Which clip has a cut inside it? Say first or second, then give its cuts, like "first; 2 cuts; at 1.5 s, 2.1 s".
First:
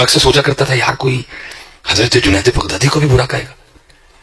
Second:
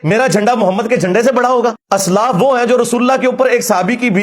second; 1 cut; at 1.8 s